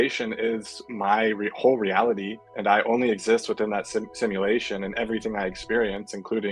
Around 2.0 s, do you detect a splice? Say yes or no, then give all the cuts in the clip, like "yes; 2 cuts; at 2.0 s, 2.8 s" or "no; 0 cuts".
no; 0 cuts